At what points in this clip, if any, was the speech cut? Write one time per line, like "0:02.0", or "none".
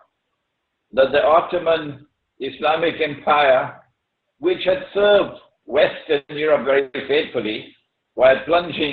0:01.4